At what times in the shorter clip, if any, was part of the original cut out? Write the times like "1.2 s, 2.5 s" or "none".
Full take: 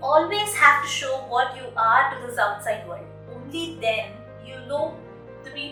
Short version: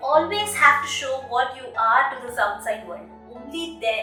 none

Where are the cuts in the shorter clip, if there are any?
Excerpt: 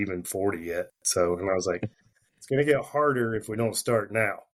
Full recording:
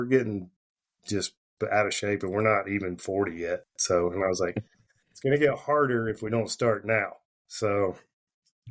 none

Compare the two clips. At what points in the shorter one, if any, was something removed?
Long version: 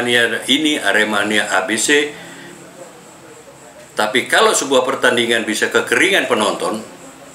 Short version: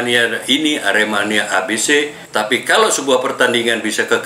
2.2 s

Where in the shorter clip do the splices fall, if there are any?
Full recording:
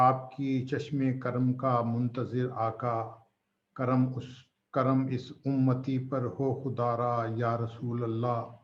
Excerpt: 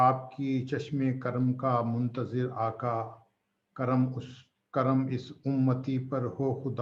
none

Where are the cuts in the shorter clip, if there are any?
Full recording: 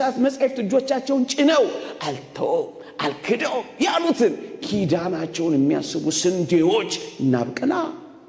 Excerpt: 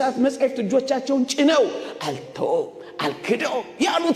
none

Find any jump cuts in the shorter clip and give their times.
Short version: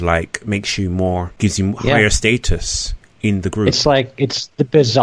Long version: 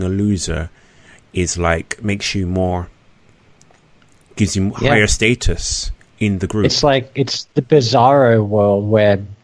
1.3 s

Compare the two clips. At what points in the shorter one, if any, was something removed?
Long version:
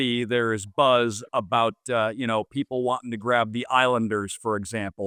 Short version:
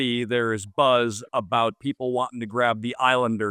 1.8 s

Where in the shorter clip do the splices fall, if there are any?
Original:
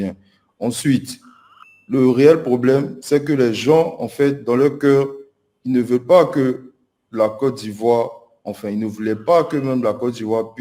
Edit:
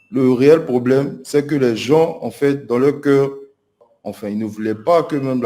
3.8 s

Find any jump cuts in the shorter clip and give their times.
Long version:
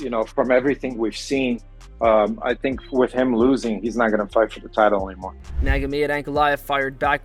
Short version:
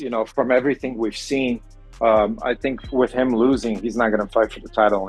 none

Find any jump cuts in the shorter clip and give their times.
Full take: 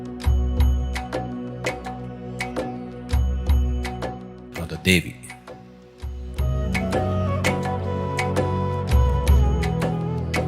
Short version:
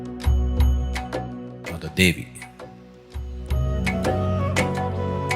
1.5 s

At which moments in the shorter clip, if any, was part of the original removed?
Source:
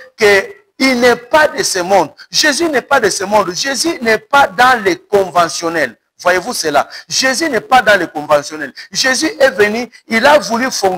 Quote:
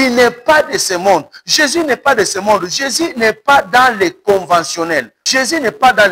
5.2 s

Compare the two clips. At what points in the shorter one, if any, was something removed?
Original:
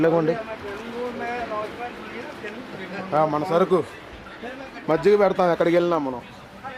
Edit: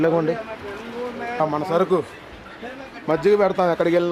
1.4 s

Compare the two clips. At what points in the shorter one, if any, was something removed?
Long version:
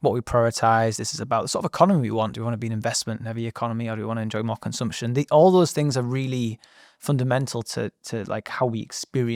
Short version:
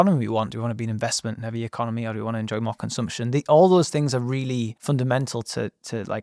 4.8 s

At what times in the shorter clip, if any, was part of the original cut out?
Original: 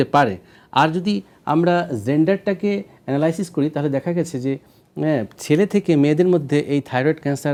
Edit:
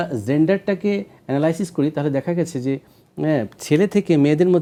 none

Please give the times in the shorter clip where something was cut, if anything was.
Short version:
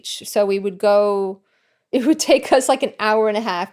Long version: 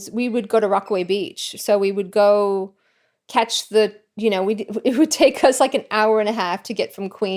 1.8 s

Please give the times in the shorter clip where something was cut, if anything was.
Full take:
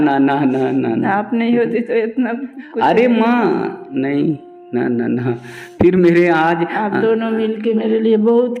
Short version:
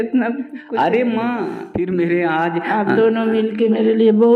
1.6 s

